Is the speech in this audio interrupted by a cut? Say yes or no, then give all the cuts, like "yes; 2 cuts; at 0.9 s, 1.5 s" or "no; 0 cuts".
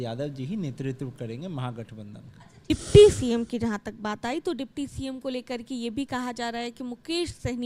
yes; 1 cut; at 2.7 s